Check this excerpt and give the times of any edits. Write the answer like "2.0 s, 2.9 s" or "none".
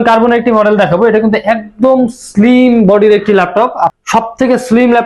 3.9 s

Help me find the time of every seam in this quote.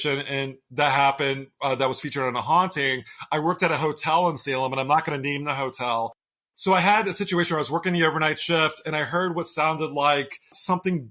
6.4 s

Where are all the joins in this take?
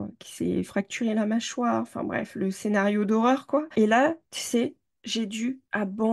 none

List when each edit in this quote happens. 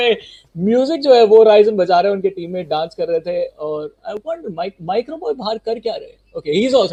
none

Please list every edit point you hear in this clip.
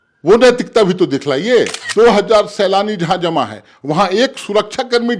1.8 s

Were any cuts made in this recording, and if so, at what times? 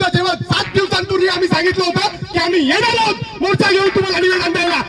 none

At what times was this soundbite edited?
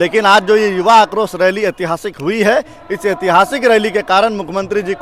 none

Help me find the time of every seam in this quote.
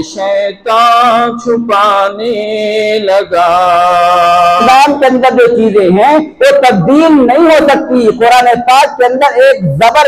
4.6 s

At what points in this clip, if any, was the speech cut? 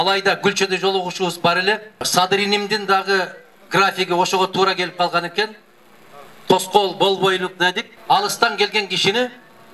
2.1 s, 7.9 s

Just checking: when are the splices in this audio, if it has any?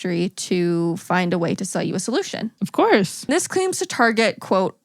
2.6 s, 3.3 s

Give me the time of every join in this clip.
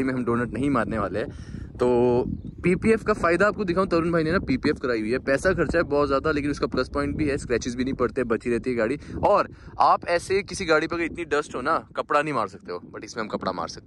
none

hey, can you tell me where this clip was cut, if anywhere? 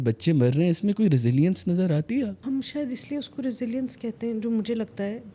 2.4 s

